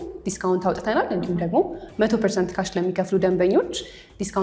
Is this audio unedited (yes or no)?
yes